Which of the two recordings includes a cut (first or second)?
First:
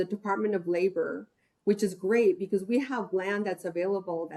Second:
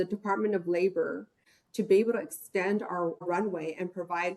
second